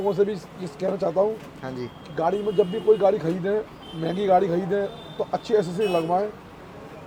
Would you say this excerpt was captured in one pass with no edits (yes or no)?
yes